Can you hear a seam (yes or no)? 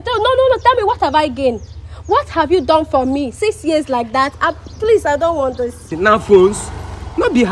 yes